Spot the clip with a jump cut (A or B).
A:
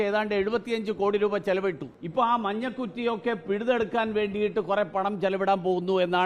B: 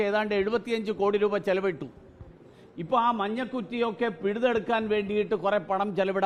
A